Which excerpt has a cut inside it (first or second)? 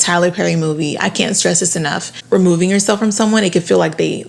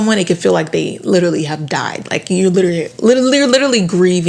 first